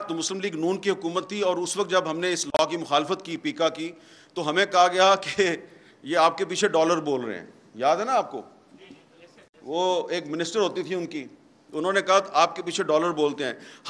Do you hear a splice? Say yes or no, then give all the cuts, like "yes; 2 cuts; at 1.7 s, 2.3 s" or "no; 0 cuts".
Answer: no; 0 cuts